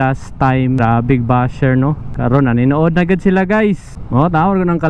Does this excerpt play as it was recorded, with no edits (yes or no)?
no